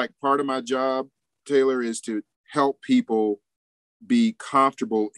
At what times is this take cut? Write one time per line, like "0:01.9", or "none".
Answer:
0:02.4